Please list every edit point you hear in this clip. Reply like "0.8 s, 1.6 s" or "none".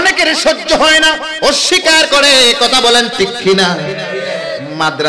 1.3 s